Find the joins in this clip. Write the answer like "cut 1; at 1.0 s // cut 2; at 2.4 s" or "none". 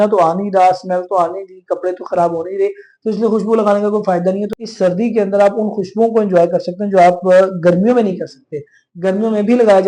cut 1; at 4.5 s